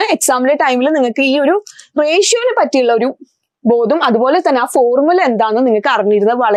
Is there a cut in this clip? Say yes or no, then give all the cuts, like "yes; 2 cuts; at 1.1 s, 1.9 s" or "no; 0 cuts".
no; 0 cuts